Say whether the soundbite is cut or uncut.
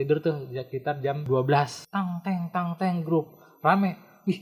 cut